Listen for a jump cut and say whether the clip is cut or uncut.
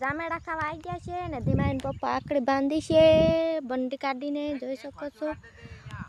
uncut